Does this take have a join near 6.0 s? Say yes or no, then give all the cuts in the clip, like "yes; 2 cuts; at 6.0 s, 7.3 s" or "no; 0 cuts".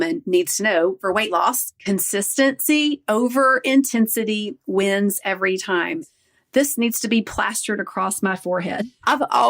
yes; 3 cuts; at 1.0 s, 1.7 s, 6.0 s